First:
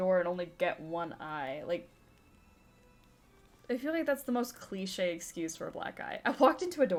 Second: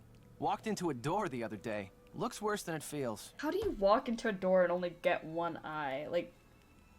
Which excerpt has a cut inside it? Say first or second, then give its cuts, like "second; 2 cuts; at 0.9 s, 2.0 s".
second; 1 cut; at 3.3 s